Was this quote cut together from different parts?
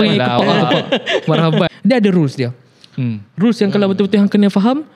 yes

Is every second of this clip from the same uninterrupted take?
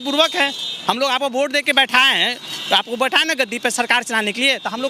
yes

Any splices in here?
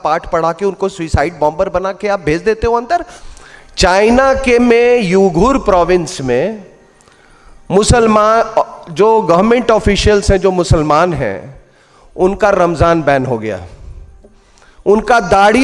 yes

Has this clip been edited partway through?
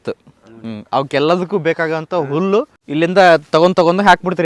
yes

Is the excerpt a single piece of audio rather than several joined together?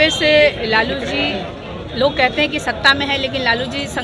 yes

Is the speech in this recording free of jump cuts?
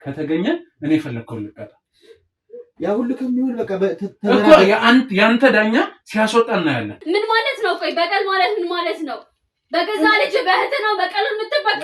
no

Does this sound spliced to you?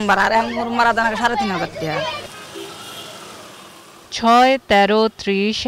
no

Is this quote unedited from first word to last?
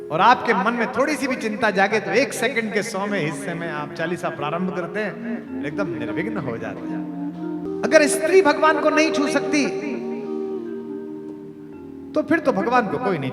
no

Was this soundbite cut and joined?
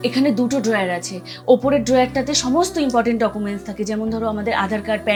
no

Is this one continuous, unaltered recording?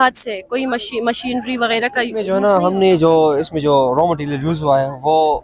no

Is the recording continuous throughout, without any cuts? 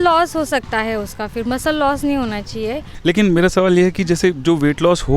yes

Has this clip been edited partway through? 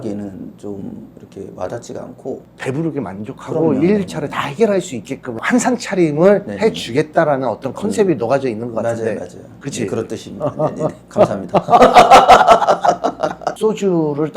yes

